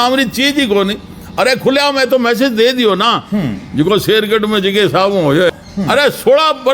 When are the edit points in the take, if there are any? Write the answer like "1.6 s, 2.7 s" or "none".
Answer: 5.6 s